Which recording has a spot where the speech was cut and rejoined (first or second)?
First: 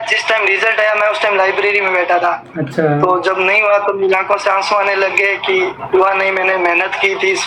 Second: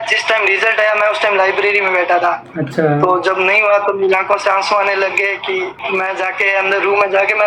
second